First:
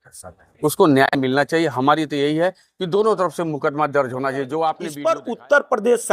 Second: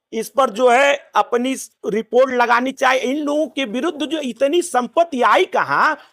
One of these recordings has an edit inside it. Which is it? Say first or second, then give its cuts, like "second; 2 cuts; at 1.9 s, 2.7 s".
first; 1 cut; at 4.5 s